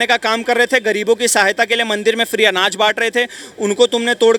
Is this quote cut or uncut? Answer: uncut